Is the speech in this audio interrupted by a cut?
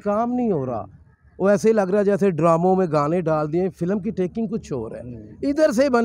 no; 0 cuts

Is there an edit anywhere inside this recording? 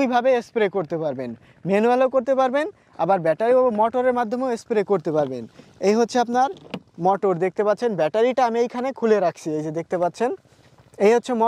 no; 0 cuts

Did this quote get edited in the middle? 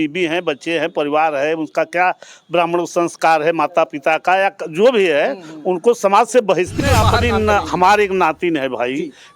yes; 1 cut; at 6.8 s

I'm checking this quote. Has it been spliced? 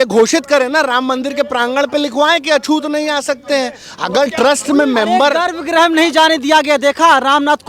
no; 0 cuts

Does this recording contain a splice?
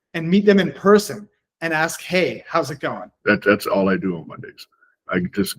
yes; 1 cut; at 3.1 s

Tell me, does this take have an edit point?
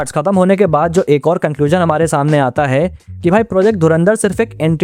no; 0 cuts

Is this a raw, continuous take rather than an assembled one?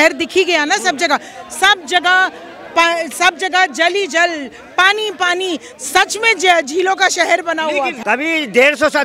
no; 1 cut; at 8.0 s

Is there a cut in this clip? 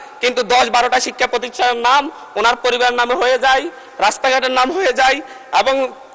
no; 0 cuts

